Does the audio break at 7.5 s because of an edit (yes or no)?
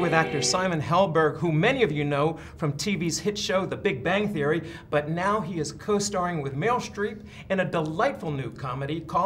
no